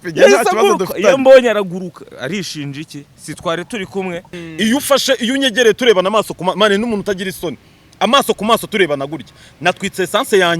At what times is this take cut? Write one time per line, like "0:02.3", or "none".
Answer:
0:04.4

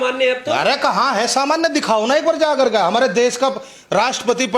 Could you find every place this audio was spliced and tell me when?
none

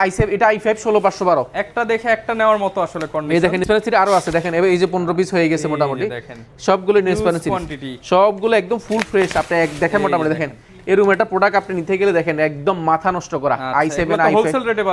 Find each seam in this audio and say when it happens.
none

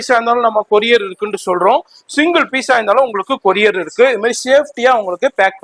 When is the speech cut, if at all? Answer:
none

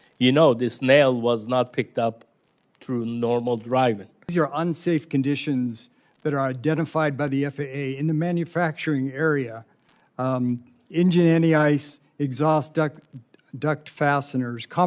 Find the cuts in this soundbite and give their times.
0:04.3

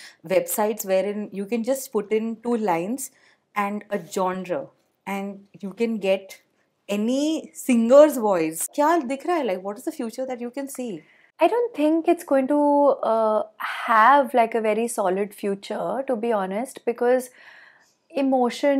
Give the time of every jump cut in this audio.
0:08.6

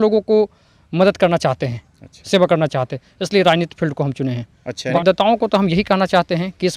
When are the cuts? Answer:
0:04.9

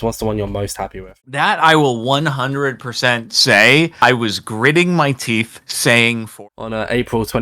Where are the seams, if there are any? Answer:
0:01.1
0:06.3

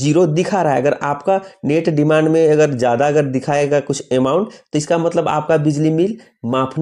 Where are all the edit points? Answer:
none

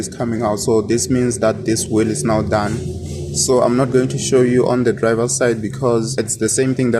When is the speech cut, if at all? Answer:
none

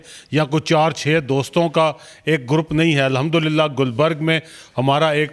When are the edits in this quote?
none

